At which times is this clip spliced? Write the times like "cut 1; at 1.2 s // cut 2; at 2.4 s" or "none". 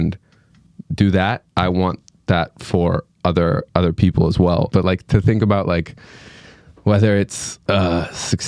cut 1; at 4.7 s